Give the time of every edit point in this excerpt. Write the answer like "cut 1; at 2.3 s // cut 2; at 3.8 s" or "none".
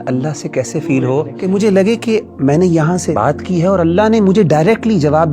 cut 1; at 1.3 s // cut 2; at 3.1 s